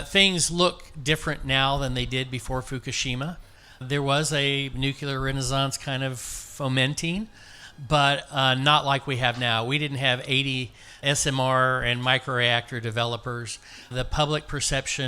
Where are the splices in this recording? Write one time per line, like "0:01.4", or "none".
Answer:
0:03.8
0:11.0
0:13.9